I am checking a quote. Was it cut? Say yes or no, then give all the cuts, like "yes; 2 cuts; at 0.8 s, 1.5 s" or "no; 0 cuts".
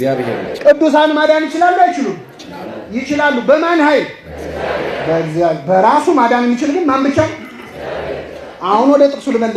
no; 0 cuts